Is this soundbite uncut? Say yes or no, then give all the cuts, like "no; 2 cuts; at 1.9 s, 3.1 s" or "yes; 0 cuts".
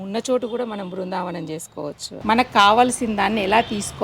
no; 1 cut; at 2.2 s